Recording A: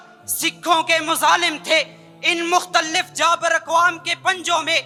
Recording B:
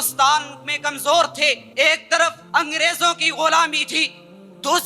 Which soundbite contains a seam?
B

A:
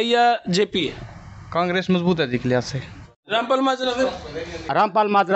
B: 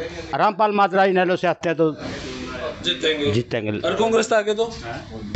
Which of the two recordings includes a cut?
A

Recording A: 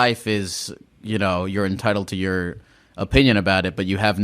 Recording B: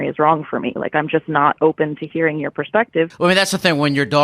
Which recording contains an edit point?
B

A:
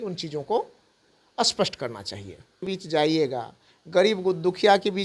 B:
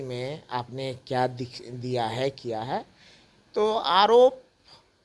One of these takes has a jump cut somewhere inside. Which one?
A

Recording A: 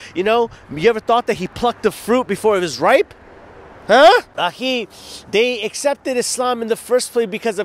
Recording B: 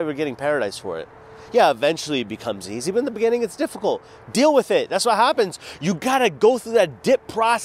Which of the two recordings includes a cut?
A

